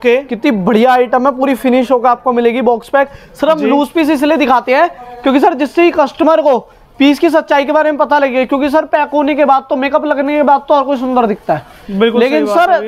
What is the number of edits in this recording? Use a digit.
0